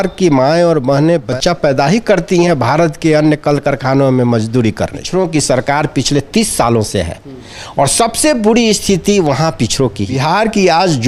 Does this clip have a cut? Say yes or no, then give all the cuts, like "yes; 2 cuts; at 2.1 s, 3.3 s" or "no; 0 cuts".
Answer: yes; 3 cuts; at 1.3 s, 5.0 s, 10.2 s